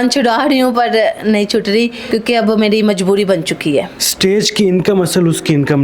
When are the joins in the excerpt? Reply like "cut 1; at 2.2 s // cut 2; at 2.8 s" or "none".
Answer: cut 1; at 4.0 s